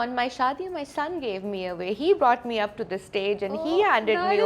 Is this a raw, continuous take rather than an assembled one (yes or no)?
yes